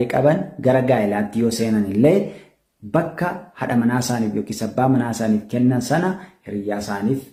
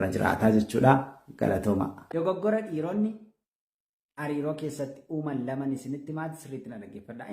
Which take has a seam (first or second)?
second